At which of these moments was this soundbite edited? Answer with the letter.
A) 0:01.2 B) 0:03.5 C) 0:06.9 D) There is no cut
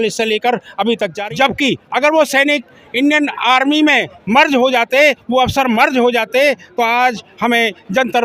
A